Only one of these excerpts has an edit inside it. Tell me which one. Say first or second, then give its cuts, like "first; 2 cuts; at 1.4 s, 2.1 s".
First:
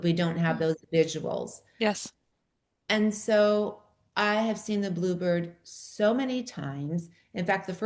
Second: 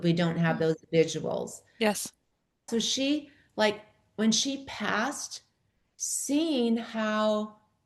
second; 1 cut; at 2.7 s